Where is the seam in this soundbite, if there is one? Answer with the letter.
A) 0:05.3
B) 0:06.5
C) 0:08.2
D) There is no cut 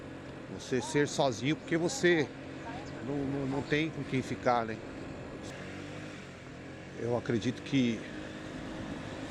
A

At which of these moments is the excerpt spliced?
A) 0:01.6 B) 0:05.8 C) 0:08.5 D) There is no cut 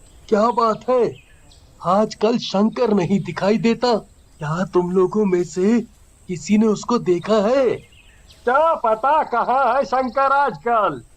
D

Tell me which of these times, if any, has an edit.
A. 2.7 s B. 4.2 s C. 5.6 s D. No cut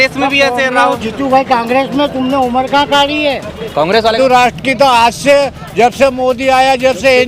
B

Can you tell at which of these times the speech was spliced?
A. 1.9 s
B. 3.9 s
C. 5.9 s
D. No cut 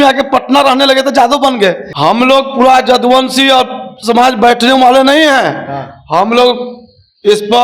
A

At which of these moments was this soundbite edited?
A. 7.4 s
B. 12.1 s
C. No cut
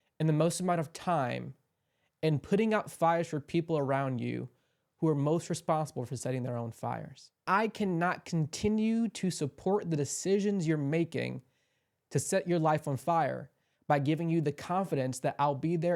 A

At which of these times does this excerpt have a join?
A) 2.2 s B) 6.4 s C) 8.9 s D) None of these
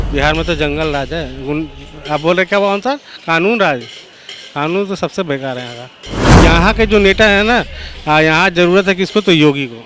B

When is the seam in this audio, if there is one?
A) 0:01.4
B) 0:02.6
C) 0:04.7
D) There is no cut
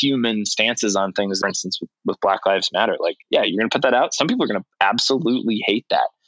A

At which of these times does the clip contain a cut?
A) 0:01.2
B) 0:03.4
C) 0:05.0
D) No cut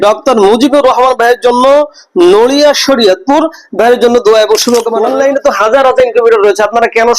C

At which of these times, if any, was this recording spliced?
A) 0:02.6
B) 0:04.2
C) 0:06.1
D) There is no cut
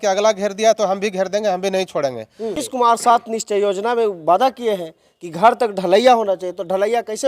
A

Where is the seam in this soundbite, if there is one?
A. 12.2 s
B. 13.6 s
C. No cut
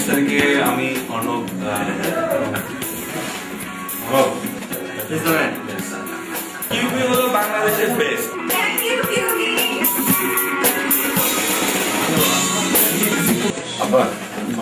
B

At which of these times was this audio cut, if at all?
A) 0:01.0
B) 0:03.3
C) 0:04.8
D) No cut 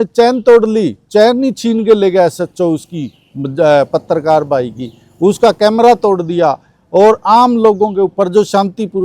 D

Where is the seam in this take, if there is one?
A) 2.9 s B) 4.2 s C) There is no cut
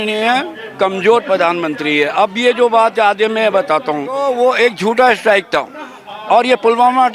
B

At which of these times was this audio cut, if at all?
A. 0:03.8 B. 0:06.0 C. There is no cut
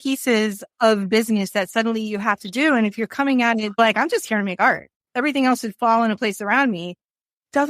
A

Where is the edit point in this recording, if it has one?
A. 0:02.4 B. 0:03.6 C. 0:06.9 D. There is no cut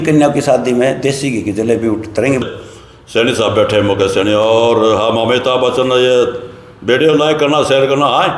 A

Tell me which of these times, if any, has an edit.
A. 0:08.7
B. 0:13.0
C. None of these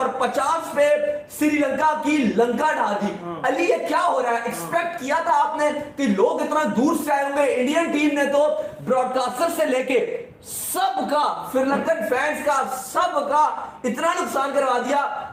C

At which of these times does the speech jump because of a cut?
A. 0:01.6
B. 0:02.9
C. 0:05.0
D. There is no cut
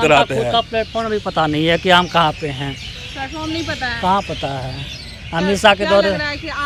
D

